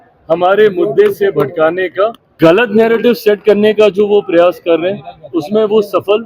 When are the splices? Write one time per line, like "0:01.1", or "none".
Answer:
0:02.2